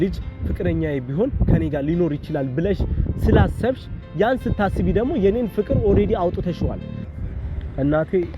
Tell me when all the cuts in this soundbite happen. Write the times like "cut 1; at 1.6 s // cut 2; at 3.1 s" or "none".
cut 1; at 6.9 s